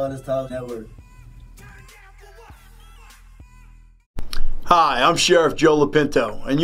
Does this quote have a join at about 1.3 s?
no; 1 cut; at 4.1 s

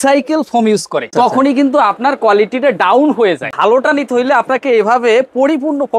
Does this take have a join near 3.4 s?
yes; 2 cuts; at 1.1 s, 3.4 s

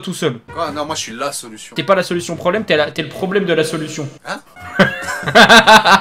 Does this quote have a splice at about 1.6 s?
yes; 1 cut; at 1.6 s

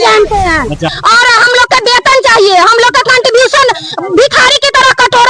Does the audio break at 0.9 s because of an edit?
yes; 1 cut; at 0.9 s

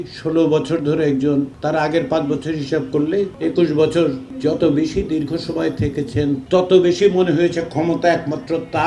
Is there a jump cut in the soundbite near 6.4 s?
yes; 4 cuts; at 1.5 s, 3.3 s, 4.3 s, 6.4 s

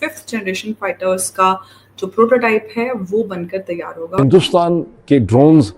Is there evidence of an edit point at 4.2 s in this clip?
yes; 1 cut; at 4.2 s

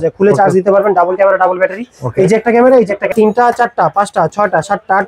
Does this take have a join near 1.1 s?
no; 1 cut; at 3.1 s

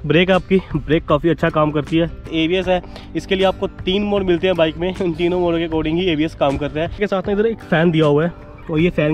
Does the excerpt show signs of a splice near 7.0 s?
yes; 2 cuts; at 2.2 s, 7.0 s

